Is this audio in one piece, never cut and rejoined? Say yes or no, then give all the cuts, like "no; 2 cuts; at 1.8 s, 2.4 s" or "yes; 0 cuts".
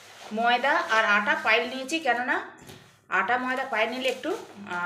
yes; 0 cuts